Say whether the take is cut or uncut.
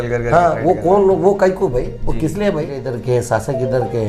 cut